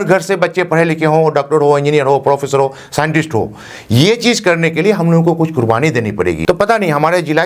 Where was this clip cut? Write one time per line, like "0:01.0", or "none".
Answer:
0:06.4